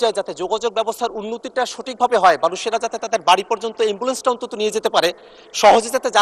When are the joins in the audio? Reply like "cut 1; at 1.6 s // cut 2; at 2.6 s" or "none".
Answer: cut 1; at 5.3 s

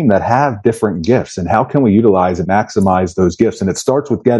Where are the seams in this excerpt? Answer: cut 1; at 2.5 s

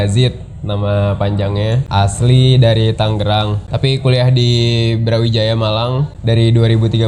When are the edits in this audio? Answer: cut 1; at 1.8 s // cut 2; at 3.6 s // cut 3; at 6.1 s

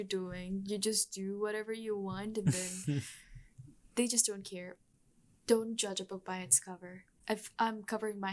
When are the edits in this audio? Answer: cut 1; at 4.8 s // cut 2; at 7.2 s

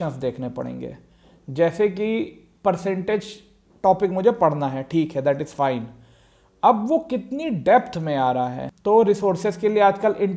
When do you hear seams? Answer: cut 1; at 8.7 s

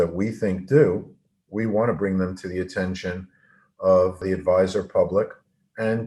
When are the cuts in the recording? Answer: cut 1; at 4.2 s

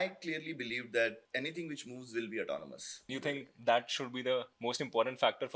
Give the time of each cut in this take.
cut 1; at 1.2 s // cut 2; at 3.1 s // cut 3; at 4.5 s

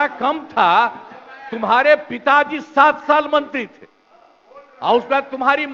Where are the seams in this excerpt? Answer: none

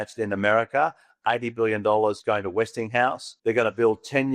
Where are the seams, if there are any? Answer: cut 1; at 2.2 s // cut 2; at 3.3 s

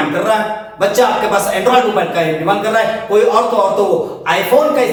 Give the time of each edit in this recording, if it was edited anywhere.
none

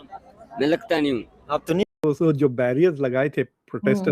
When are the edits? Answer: cut 1; at 1.8 s

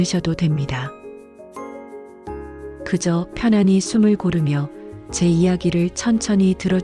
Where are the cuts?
cut 1; at 0.9 s // cut 2; at 2.9 s

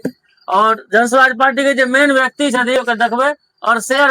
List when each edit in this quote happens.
cut 1; at 2.8 s

